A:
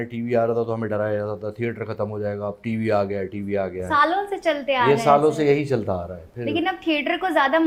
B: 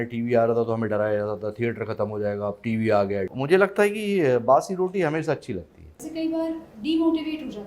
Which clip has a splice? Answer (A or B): B